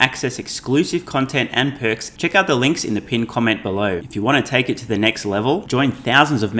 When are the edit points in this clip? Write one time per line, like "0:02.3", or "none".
0:02.1
0:04.0